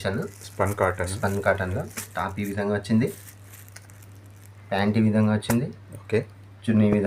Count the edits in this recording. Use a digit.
0